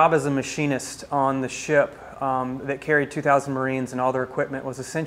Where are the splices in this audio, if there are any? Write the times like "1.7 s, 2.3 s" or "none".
none